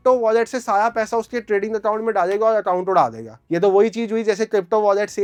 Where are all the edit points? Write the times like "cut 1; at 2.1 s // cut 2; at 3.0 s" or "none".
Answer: none